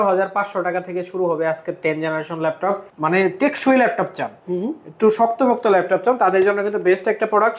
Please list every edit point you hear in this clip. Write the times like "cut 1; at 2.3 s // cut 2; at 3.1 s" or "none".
cut 1; at 2.9 s

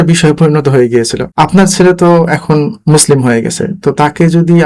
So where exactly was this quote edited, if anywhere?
cut 1; at 1.2 s

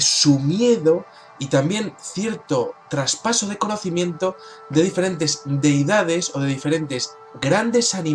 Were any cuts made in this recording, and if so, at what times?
cut 1; at 6.8 s

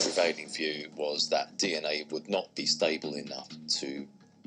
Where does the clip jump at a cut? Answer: none

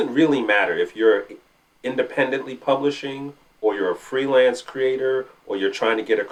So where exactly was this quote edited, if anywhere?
none

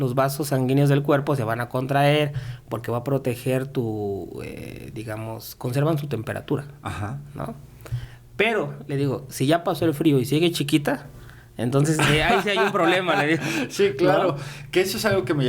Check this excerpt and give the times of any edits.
none

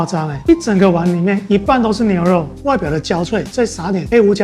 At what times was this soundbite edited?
cut 1; at 2.5 s

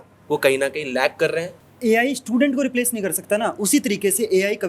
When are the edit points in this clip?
cut 1; at 1.6 s

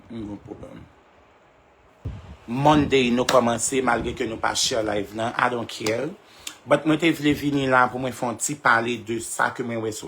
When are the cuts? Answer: cut 1; at 2.0 s

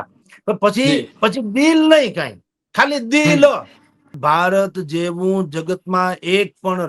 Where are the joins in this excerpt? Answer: cut 1; at 4.1 s

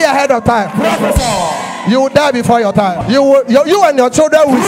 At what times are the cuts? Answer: cut 1; at 3.0 s

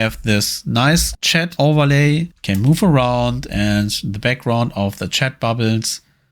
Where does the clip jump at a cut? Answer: cut 1; at 2.3 s

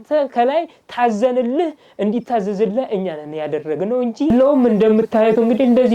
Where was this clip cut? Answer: cut 1; at 4.3 s

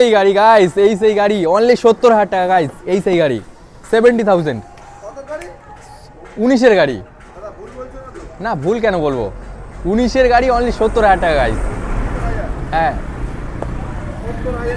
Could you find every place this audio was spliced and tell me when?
none

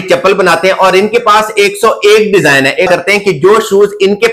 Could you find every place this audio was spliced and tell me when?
none

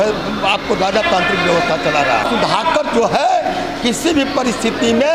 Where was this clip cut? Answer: cut 1; at 2.2 s

